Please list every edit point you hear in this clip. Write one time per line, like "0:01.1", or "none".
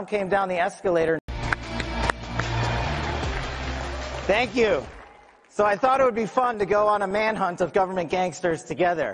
0:01.3
0:06.2

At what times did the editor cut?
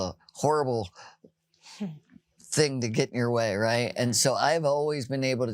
none

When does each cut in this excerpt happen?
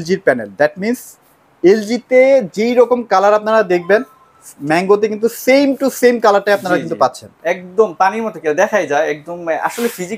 none

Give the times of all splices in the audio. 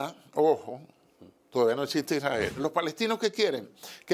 0:02.6

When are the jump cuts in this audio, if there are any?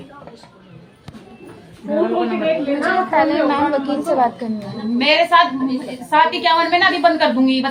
none

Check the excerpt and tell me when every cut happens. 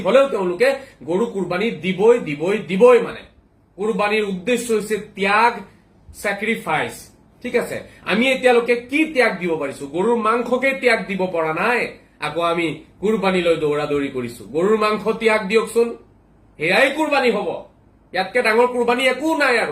0:03.6

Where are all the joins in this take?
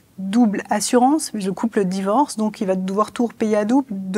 none

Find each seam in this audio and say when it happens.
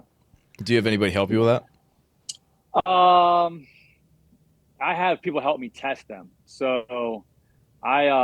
none

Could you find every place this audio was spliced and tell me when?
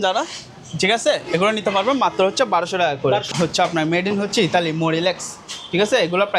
0:03.3

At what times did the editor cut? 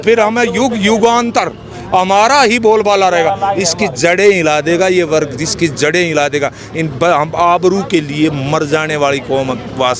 none

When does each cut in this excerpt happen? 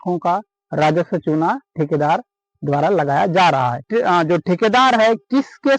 none

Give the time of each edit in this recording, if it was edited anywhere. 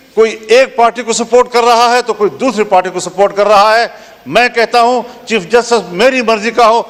none

